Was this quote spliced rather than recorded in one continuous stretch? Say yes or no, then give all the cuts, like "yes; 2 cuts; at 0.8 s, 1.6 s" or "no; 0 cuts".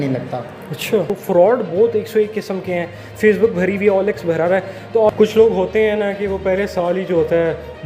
yes; 2 cuts; at 1.2 s, 5.1 s